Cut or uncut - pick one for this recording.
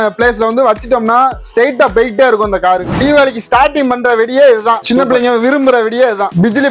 cut